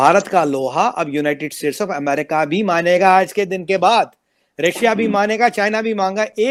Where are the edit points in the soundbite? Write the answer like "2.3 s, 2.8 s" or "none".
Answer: none

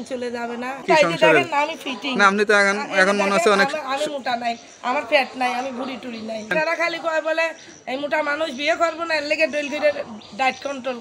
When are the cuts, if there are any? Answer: 0.8 s, 6.5 s

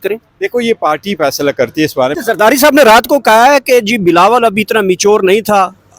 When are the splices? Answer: 2.2 s

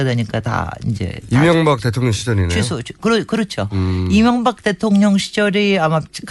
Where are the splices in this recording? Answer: 1.8 s

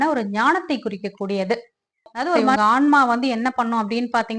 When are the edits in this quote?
2.6 s

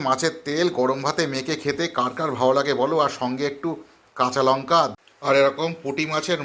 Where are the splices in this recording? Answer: 4.9 s

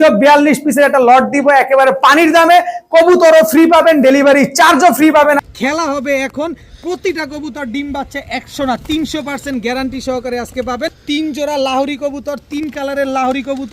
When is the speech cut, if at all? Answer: 5.4 s, 11.0 s

